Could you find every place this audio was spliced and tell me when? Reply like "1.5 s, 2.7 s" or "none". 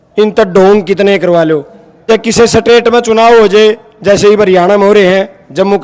2.0 s

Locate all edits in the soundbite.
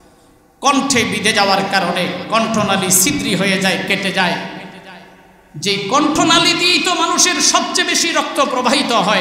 none

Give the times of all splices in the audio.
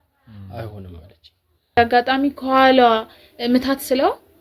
1.8 s

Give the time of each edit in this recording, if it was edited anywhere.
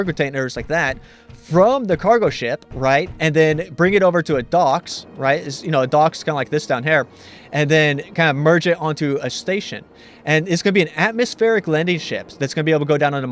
none

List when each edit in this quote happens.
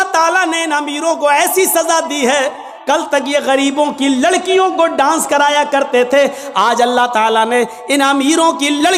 2.7 s

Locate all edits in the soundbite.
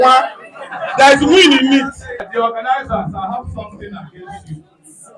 2.2 s

